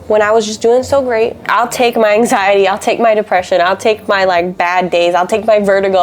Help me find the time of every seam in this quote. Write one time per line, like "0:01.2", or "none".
0:01.4